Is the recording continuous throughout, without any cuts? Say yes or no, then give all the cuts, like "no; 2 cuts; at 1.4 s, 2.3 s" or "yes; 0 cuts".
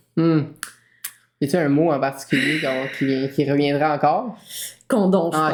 yes; 0 cuts